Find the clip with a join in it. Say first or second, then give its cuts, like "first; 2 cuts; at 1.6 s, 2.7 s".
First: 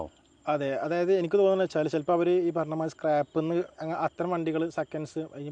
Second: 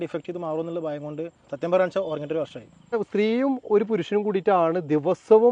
second; 1 cut; at 3.0 s